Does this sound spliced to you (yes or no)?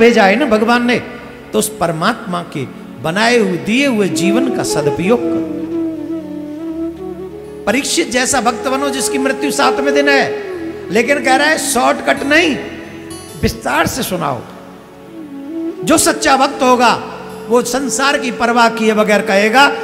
no